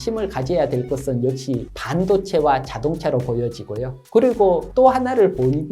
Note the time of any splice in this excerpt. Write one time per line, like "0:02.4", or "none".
none